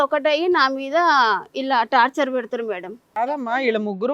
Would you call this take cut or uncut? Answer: cut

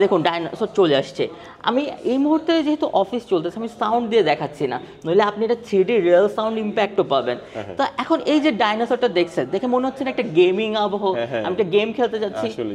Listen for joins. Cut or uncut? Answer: uncut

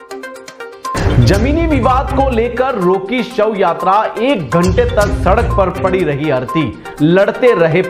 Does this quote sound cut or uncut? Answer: uncut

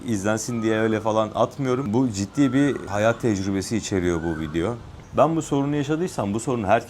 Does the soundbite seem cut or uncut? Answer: cut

